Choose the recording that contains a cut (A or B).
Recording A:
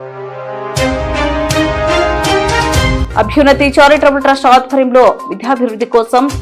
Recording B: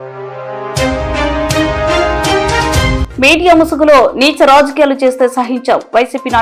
A